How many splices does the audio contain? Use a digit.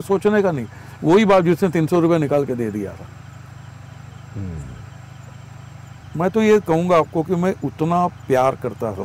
1